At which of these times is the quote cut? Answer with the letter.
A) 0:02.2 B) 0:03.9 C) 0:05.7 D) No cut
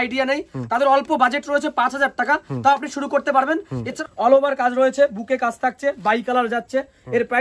B